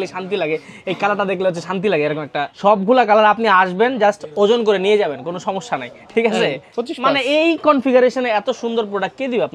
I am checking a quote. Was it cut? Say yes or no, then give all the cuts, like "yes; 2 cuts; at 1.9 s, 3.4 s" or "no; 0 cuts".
yes; 2 cuts; at 2.5 s, 6.7 s